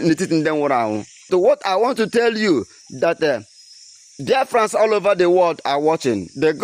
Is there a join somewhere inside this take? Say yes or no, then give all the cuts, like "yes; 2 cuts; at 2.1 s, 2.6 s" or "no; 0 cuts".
yes; 1 cut; at 1.3 s